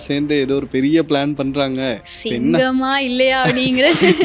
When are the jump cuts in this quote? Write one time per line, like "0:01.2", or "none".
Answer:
none